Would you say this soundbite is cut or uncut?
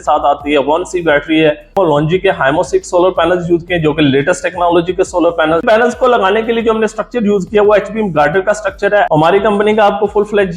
cut